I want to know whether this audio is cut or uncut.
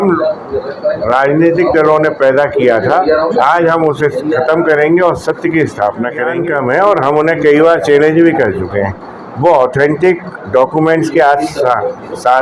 cut